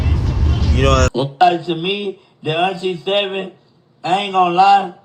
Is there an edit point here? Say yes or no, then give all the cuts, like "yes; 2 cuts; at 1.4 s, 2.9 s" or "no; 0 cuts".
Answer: yes; 1 cut; at 1.1 s